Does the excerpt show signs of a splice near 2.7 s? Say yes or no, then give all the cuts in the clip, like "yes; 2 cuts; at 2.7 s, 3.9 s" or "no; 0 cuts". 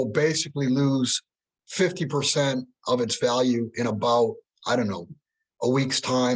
no; 0 cuts